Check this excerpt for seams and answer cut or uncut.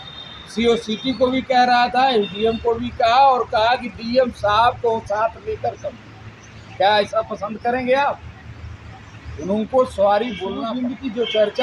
cut